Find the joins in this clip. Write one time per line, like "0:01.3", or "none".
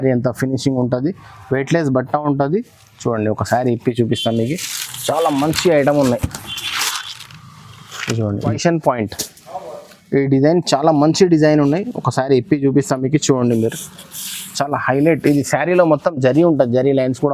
0:08.4

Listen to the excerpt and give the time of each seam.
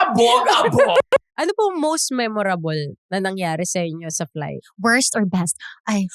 0:01.0

